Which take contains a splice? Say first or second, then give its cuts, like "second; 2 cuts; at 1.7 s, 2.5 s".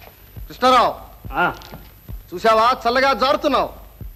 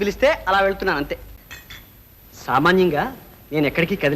second; 1 cut; at 1.3 s